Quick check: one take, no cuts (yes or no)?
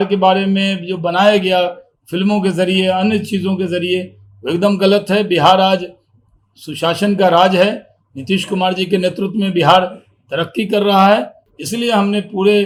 yes